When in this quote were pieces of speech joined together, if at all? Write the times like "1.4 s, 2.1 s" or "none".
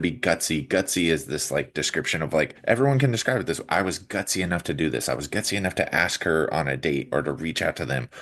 2.6 s